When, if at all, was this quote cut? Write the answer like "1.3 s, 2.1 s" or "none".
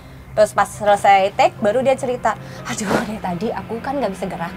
none